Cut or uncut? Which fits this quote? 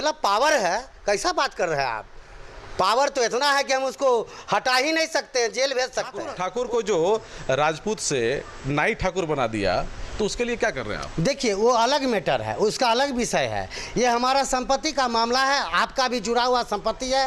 cut